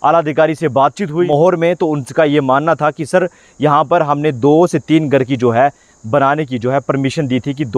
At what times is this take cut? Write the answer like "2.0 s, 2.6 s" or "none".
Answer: 1.3 s

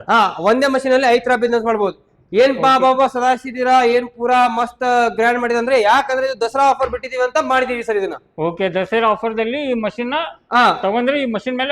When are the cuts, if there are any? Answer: none

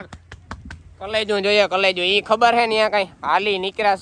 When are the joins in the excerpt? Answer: 1.2 s

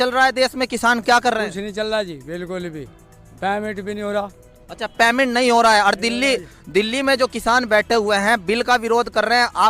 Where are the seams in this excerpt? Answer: none

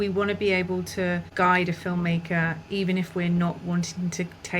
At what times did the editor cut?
1.3 s

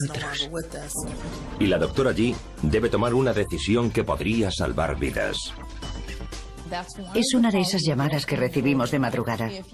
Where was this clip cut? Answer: none

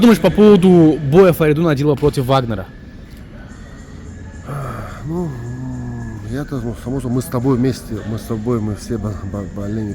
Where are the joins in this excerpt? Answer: none

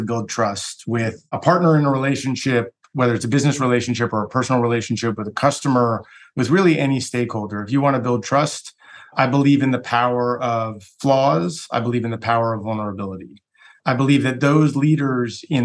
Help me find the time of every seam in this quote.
1.2 s

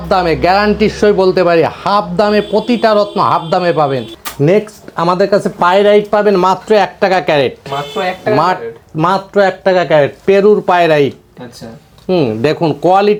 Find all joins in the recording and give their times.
none

